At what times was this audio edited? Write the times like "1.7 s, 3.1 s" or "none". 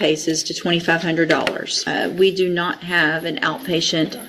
1.8 s